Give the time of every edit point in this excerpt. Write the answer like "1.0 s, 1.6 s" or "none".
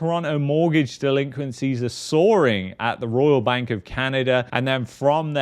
4.5 s